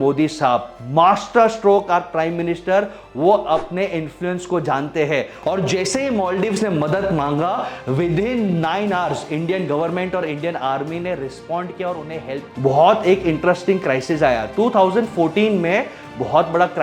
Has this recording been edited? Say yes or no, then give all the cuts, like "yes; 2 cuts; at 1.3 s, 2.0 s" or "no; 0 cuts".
yes; 2 cuts; at 5.3 s, 12.4 s